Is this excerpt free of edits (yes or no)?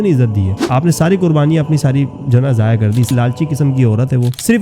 no